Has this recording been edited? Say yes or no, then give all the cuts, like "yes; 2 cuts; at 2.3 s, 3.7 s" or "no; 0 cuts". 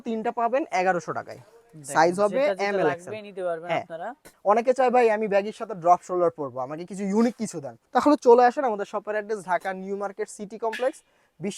yes; 2 cuts; at 4.3 s, 7.7 s